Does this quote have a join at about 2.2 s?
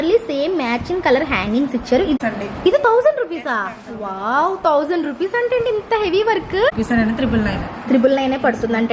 yes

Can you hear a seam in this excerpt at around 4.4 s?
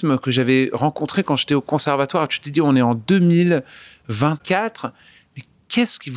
yes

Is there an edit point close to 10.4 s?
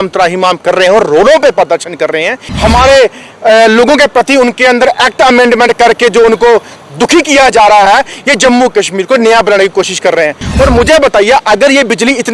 yes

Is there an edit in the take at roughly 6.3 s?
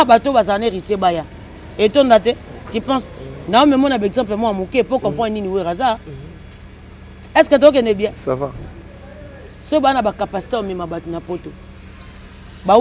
no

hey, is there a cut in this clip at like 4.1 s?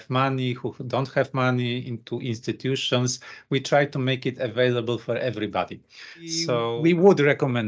no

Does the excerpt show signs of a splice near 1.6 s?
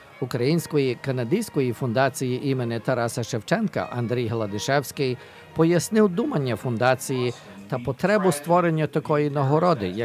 yes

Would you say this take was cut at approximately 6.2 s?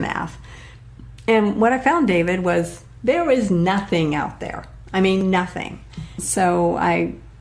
yes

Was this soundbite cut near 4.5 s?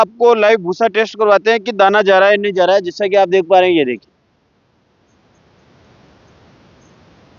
no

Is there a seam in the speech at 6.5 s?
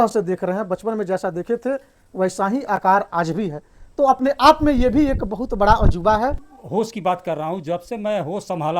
yes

